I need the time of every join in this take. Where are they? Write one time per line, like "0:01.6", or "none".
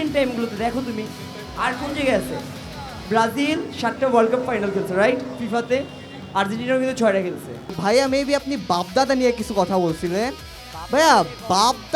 0:07.8